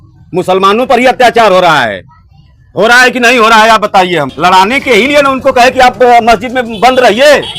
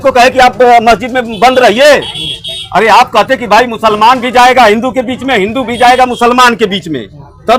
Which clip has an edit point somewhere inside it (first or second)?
first